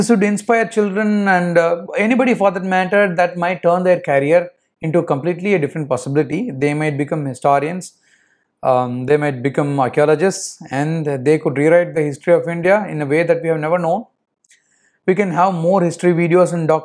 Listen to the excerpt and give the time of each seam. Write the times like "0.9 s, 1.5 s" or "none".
none